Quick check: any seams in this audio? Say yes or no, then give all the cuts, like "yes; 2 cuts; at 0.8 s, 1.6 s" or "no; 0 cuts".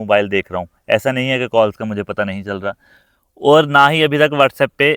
no; 0 cuts